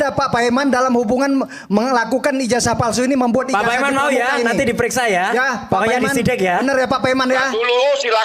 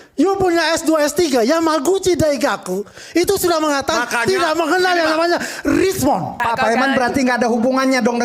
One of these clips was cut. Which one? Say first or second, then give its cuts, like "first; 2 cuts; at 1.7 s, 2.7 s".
second; 1 cut; at 6.4 s